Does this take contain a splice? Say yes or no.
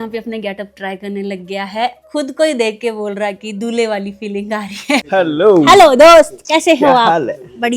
yes